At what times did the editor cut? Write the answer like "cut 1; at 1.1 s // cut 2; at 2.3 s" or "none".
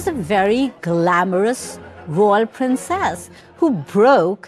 none